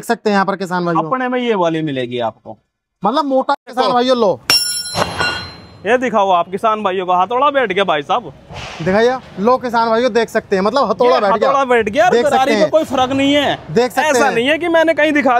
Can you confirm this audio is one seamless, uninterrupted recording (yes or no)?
no